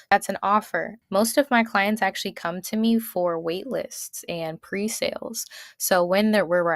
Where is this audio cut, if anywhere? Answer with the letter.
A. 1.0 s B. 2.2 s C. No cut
A